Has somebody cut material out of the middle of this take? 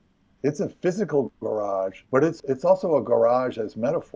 yes; 1 cut; at 2.3 s

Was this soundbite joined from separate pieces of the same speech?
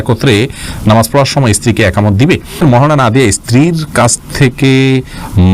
yes; 1 cut; at 2.6 s

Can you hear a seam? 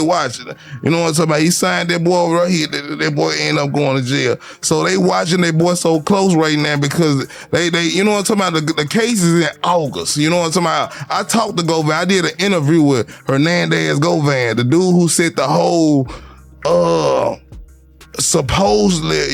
no; 0 cuts

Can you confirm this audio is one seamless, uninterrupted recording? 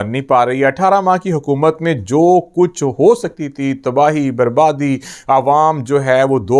yes; 0 cuts

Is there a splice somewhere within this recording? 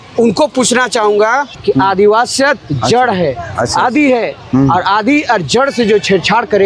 yes; 1 cut; at 1.6 s

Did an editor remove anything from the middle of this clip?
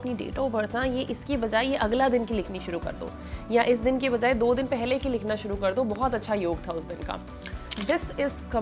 no; 0 cuts

